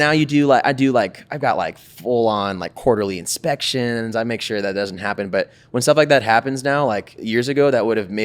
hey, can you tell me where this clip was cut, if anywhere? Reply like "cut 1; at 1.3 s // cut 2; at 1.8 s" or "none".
cut 1; at 7.1 s